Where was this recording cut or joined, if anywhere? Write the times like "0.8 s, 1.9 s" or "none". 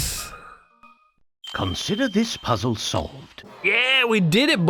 none